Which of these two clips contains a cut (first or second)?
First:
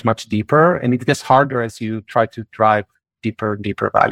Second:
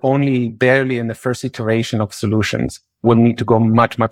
second